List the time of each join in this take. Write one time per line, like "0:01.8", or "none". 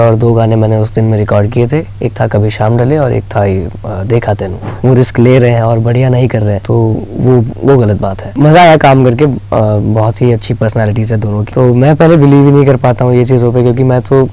0:04.6
0:06.6
0:08.2
0:11.5

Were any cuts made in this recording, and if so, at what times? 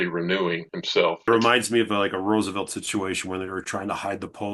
0:01.3

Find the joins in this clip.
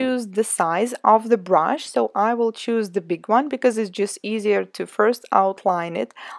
none

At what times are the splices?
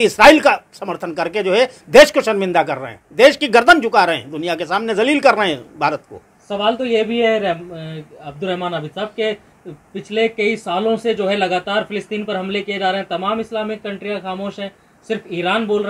none

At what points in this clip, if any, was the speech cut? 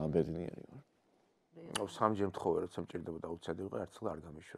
0:01.6

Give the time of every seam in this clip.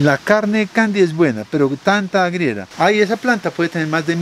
0:02.7

